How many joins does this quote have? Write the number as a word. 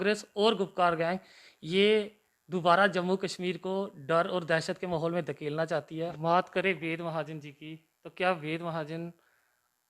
one